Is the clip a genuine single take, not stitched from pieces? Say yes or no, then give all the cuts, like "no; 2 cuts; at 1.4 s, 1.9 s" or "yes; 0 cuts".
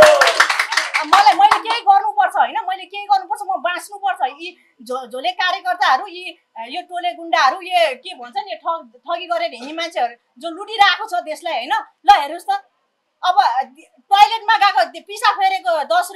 yes; 0 cuts